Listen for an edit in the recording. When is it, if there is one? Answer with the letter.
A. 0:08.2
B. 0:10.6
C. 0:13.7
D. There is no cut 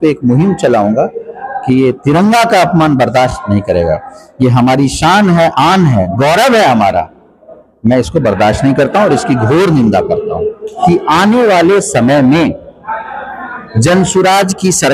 B